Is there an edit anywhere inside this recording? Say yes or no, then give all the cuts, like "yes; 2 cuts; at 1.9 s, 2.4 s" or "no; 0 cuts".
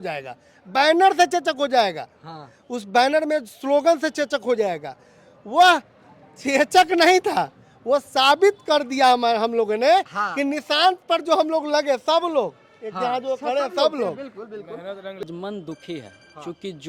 yes; 1 cut; at 15.2 s